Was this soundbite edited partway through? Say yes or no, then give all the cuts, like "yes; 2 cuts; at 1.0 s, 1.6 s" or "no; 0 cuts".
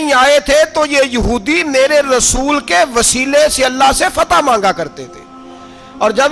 no; 0 cuts